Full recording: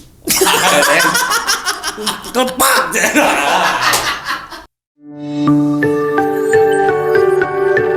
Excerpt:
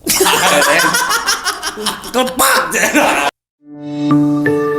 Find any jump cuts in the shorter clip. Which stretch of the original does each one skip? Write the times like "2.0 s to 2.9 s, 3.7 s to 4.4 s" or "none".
3.5 s to 4.7 s